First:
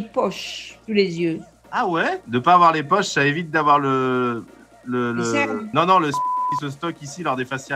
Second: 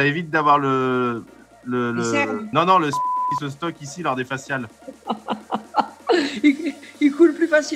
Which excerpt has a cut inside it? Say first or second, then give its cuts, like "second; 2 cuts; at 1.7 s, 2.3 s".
first; 1 cut; at 2.2 s